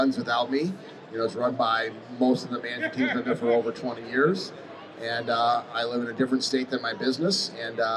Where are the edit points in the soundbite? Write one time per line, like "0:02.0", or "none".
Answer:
none